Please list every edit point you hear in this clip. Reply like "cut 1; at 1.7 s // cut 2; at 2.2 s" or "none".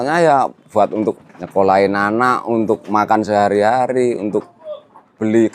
cut 1; at 1.3 s